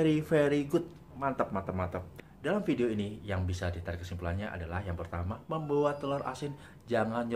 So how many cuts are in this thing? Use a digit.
1